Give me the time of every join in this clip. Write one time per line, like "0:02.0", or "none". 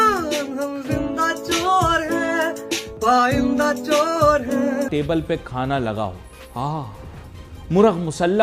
0:04.9